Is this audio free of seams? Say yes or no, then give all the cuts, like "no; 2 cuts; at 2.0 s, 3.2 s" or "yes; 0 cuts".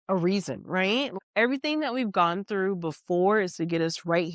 no; 1 cut; at 1.1 s